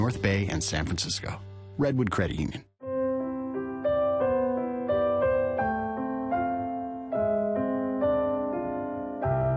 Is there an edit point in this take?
no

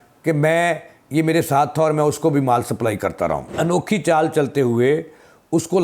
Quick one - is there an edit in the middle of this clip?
yes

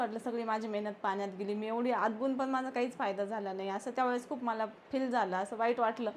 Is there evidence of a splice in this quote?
no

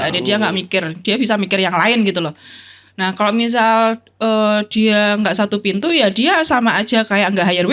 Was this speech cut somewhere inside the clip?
no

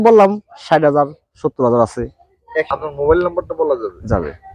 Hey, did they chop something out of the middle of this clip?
yes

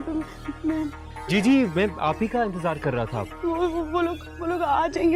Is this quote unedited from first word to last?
yes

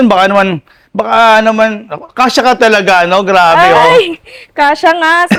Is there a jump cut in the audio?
no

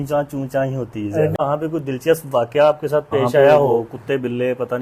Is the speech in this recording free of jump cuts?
no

